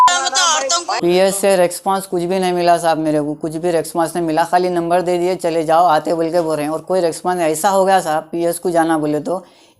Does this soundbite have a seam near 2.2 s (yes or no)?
no